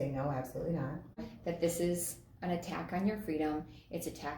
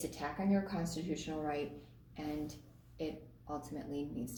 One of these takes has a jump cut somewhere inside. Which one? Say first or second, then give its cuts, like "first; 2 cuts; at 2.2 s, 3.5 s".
first; 1 cut; at 1.3 s